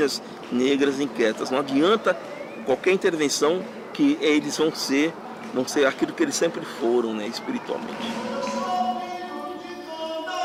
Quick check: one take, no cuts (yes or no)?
yes